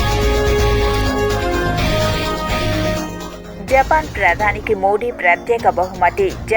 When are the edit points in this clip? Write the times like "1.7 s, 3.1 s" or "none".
1.2 s